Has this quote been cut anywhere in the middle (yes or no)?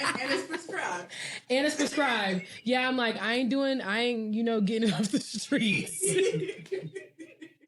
no